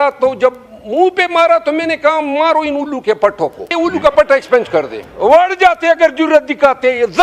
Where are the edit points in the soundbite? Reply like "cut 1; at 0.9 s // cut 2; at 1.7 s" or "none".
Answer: cut 1; at 3.7 s // cut 2; at 5.0 s